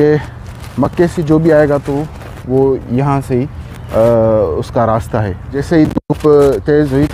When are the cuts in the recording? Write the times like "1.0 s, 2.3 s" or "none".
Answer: 5.6 s